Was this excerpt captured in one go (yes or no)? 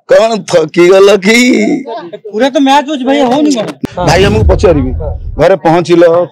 no